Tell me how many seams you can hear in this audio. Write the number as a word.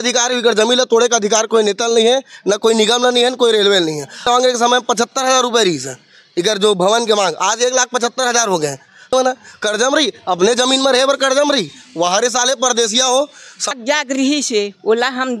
three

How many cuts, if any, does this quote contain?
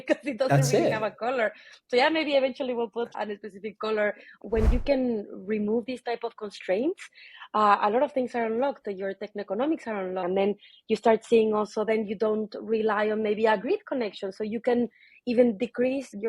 two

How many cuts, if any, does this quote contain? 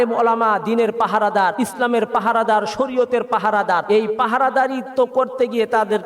two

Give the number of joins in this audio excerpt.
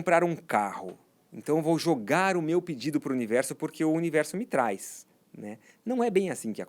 zero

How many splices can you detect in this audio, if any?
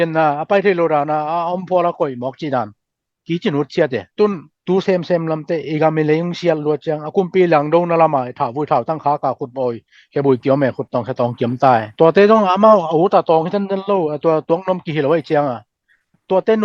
two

